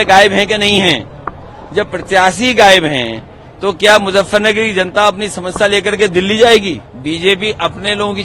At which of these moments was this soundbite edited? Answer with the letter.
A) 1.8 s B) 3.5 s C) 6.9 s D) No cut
C